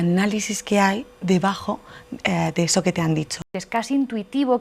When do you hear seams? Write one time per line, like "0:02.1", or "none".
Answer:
0:03.5